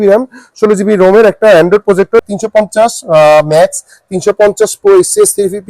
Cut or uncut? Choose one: cut